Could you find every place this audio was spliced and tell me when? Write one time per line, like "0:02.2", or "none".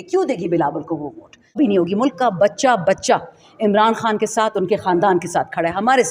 0:01.6